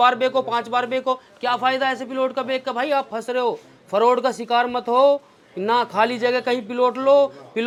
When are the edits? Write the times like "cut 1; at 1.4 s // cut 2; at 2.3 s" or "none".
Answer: none

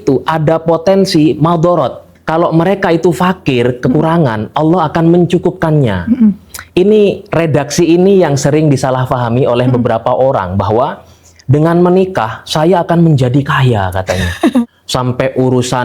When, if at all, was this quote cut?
cut 1; at 2.2 s // cut 2; at 14.8 s

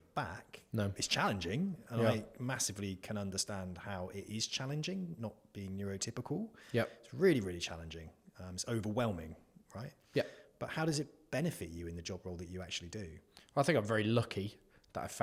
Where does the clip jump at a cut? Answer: none

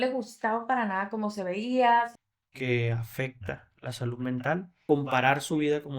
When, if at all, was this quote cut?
cut 1; at 2.1 s // cut 2; at 4.8 s

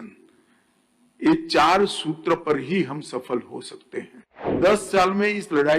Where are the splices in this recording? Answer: cut 1; at 4.6 s

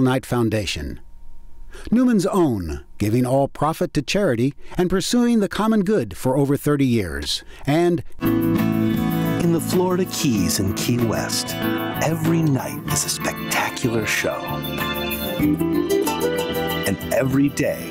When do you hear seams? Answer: none

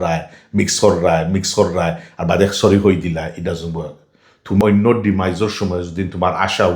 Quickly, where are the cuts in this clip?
cut 1; at 4.6 s

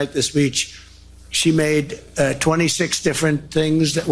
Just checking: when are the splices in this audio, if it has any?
none

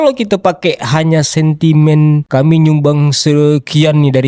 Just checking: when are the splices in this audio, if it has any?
none

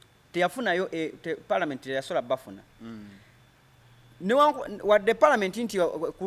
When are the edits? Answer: none

